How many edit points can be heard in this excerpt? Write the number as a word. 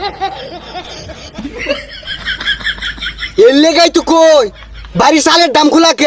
two